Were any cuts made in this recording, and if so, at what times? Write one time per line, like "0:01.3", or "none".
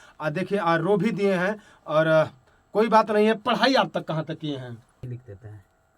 0:05.0